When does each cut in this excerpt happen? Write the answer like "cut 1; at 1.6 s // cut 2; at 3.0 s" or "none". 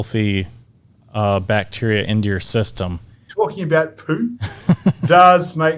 cut 1; at 3.2 s